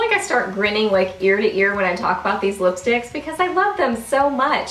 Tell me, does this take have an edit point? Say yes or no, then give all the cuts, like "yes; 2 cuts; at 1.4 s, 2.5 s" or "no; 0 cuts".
no; 0 cuts